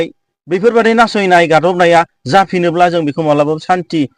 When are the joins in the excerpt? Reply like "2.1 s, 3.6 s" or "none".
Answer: none